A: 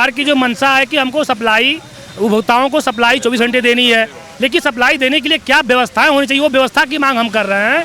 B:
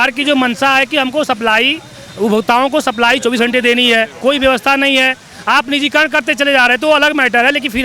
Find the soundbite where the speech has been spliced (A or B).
B